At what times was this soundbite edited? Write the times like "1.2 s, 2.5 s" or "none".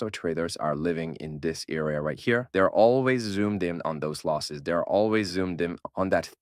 none